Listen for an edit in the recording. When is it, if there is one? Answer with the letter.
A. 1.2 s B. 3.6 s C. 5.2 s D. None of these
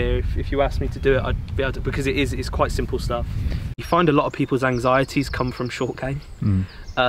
B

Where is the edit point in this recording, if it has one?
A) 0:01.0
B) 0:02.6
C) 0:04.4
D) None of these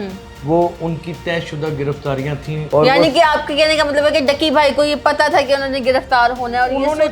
B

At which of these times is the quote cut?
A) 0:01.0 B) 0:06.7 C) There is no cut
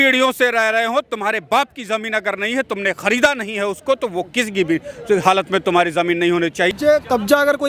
B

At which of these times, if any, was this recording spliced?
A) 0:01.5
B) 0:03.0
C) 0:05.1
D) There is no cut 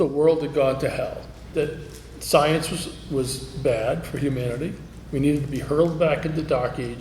A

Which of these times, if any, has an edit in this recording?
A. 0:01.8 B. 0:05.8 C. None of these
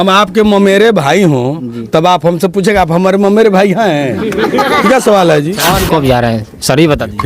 B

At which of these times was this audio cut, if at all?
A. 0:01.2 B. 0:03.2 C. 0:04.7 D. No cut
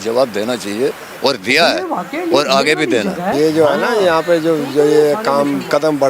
B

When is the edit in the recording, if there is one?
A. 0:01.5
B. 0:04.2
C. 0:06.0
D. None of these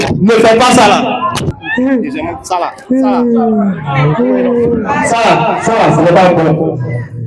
A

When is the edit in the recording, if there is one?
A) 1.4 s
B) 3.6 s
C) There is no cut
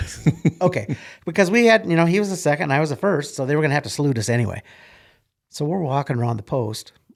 C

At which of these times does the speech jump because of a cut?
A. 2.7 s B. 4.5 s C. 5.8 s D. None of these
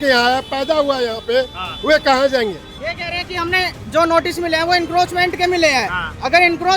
A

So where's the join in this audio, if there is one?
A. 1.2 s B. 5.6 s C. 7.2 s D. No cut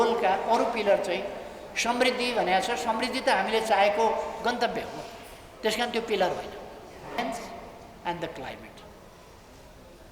C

